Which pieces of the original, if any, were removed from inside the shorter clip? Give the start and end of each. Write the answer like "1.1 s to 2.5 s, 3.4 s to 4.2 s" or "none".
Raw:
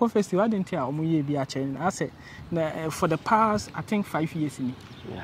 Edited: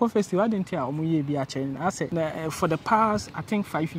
2.1 s to 2.5 s